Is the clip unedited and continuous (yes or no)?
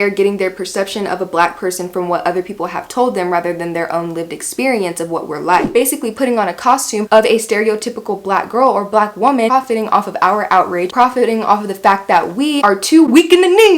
no